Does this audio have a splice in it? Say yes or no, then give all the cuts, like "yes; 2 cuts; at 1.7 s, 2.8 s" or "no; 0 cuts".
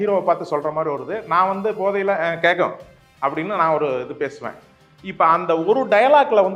no; 0 cuts